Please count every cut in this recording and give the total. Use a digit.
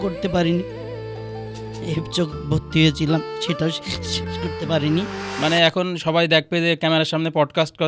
1